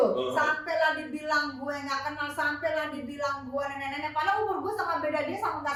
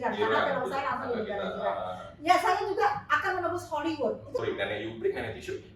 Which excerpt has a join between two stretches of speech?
second; 1 cut; at 4.4 s

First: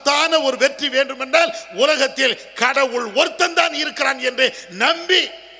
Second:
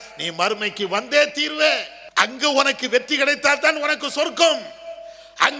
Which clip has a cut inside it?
second; 1 cut; at 2.0 s

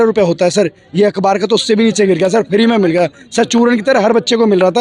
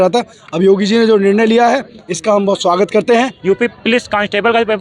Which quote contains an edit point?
second; 1 cut; at 3.3 s

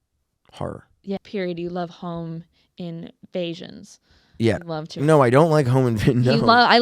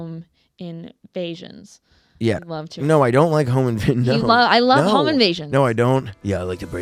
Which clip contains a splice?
first; 1 cut; at 1.2 s

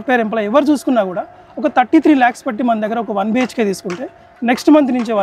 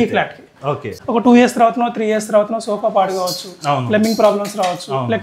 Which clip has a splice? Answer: second; 1 cut; at 0.9 s

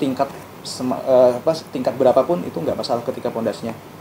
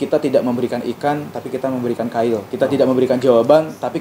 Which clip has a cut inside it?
second; 1 cut; at 2.5 s

